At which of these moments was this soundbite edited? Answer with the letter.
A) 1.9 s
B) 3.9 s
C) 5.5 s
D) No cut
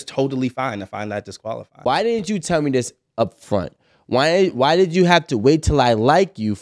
A